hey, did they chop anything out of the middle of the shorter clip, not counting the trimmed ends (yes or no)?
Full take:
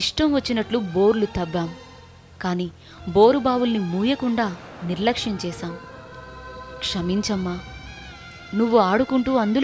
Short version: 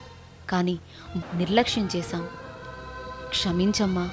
yes